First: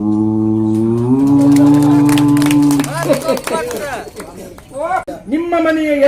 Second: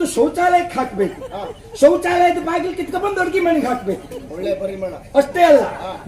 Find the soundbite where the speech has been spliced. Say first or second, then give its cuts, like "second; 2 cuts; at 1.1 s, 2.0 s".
first; 1 cut; at 5.1 s